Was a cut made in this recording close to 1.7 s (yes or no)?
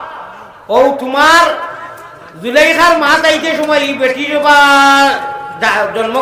no